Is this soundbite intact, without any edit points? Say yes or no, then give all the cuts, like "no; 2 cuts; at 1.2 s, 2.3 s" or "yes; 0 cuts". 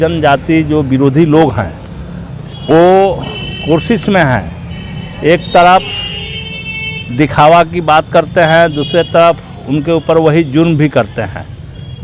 yes; 0 cuts